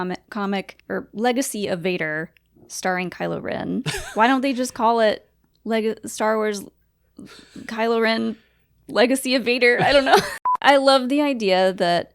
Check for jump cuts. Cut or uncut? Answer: cut